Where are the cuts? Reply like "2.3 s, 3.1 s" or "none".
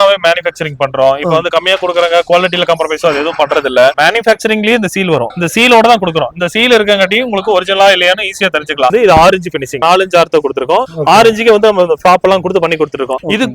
3.9 s, 8.9 s, 9.8 s

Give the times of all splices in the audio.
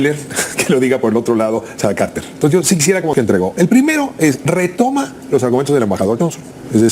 3.1 s

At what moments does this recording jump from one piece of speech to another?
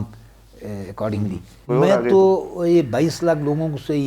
1.6 s

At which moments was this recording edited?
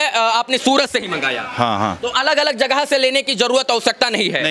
none

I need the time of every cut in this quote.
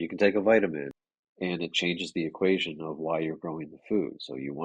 1.0 s

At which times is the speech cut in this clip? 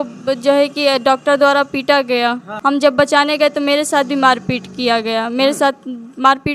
2.5 s

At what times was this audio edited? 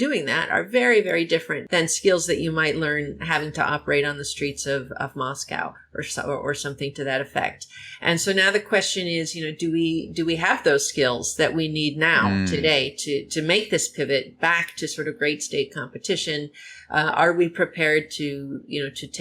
1.6 s

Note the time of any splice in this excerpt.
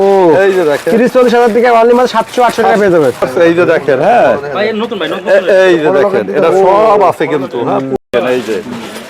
3.2 s, 8.0 s

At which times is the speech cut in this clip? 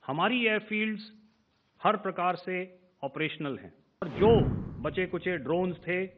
4.0 s

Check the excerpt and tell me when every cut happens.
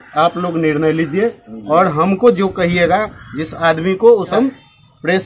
4.3 s

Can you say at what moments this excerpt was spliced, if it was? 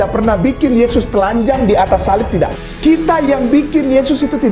2.6 s

